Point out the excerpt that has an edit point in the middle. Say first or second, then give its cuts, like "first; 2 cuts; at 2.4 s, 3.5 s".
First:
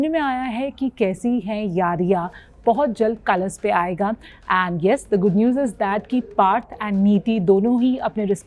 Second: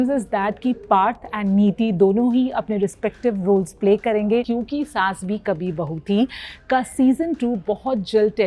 second; 1 cut; at 4.5 s